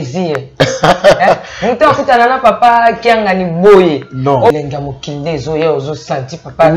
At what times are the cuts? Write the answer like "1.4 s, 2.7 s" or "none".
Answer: 4.5 s